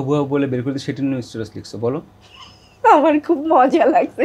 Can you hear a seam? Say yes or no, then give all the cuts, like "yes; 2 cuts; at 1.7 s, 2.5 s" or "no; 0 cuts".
no; 0 cuts